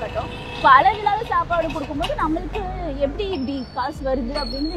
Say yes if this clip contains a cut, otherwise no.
no